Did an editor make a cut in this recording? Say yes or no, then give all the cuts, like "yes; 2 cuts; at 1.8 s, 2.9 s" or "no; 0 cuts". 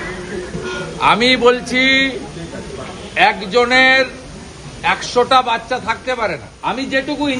yes; 1 cut; at 6.5 s